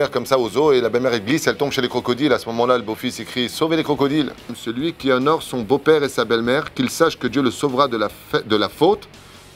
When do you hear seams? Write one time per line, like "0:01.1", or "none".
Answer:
0:04.6